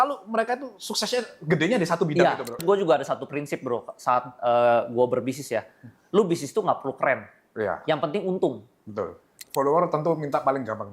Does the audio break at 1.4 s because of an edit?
no; 2 cuts; at 2.6 s, 9.4 s

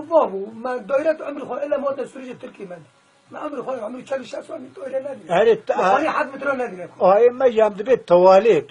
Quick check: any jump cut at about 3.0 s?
no; 1 cut; at 5.2 s

